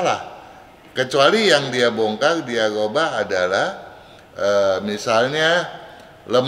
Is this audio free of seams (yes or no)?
yes